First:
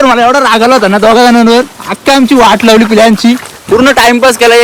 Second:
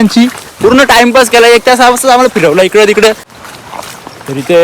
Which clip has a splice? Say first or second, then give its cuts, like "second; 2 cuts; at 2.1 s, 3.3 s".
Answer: second; 1 cut; at 3.3 s